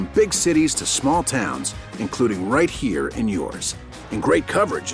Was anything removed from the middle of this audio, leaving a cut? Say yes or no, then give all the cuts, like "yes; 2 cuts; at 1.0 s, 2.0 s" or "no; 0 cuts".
no; 0 cuts